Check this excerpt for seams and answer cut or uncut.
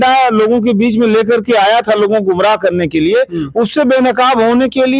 uncut